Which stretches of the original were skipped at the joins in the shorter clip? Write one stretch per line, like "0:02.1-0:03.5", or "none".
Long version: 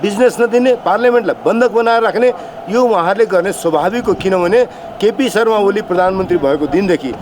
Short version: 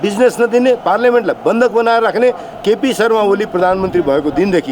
0:02.5-0:04.9